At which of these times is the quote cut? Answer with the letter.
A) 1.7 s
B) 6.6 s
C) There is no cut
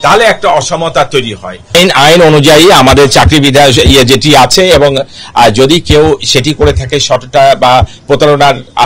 A